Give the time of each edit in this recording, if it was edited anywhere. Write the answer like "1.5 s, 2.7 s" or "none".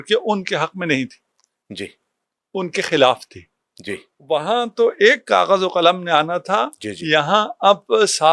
4.1 s